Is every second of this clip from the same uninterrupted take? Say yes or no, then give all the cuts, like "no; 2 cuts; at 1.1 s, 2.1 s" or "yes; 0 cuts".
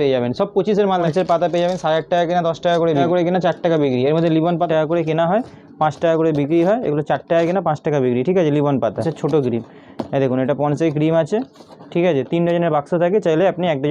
no; 4 cuts; at 1.1 s, 3.0 s, 4.7 s, 9.1 s